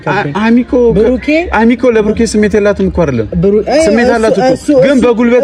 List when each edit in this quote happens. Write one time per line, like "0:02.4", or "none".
none